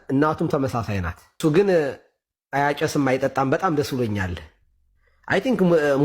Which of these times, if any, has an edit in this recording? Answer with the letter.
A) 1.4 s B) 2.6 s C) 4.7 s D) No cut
A